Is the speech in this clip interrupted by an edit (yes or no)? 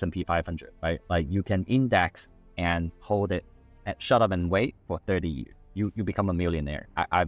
no